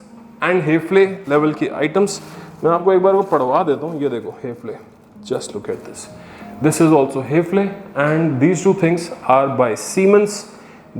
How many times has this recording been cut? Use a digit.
0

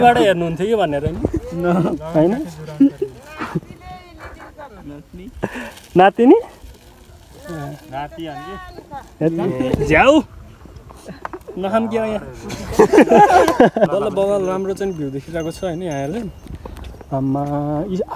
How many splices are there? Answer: 1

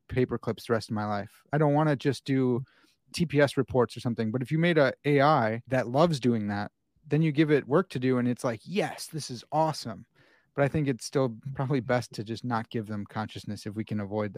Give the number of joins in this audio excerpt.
3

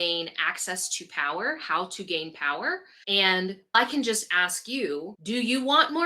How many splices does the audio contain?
3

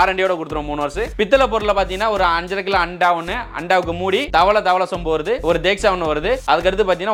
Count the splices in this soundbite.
0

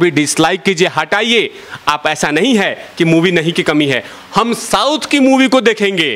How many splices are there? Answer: 0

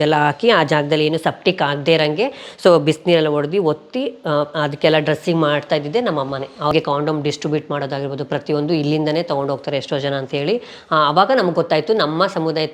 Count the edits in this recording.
1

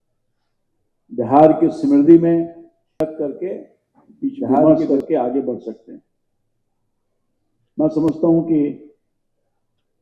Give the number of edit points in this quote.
1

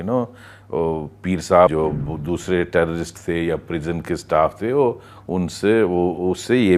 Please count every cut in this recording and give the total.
1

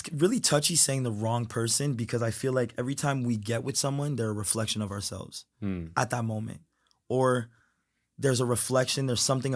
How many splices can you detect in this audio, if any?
0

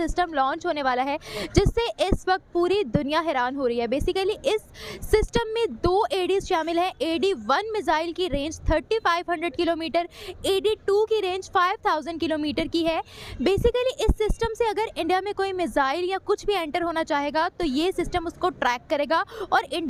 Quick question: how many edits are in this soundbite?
0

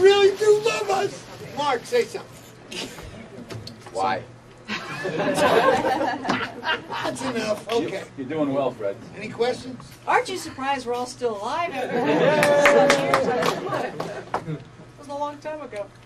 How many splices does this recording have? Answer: 1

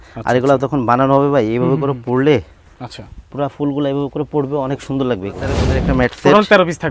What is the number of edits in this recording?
1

